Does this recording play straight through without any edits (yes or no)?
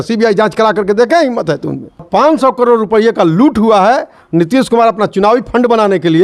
no